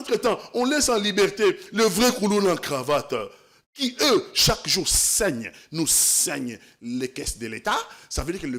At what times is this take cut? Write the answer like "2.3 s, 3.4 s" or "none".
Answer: none